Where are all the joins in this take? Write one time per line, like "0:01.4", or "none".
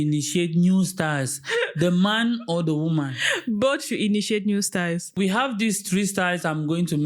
0:05.1